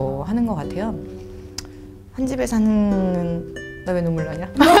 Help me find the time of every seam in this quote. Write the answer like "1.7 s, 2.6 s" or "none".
none